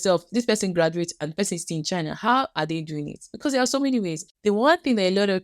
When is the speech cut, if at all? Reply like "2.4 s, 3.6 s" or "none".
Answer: 4.3 s